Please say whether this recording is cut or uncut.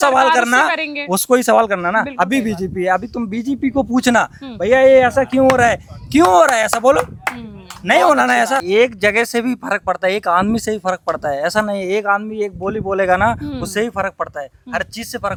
uncut